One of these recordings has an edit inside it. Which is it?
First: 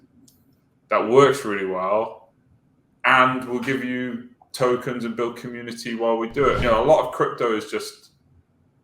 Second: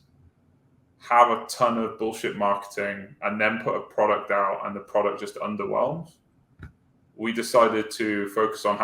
first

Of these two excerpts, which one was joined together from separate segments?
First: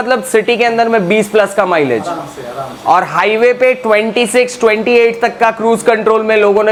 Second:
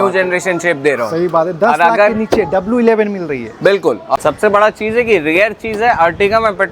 second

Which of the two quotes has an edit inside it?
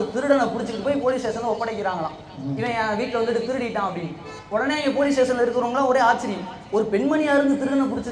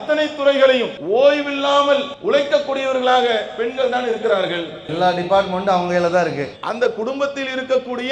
second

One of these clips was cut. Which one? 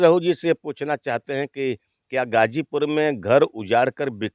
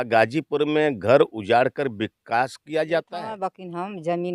second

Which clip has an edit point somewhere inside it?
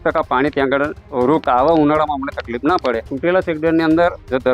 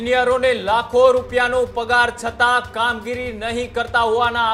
first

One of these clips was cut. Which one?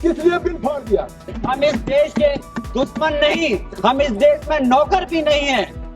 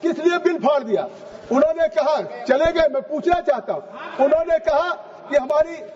first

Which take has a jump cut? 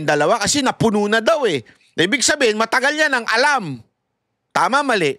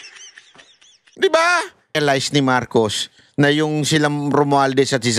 second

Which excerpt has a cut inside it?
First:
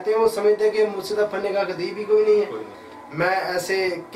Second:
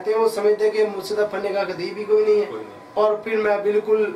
first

